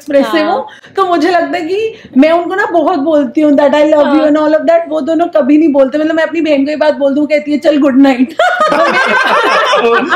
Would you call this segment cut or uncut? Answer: uncut